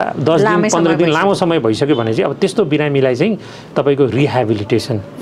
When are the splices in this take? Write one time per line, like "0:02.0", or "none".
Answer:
none